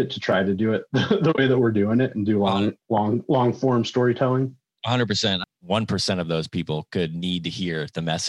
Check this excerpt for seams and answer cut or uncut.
cut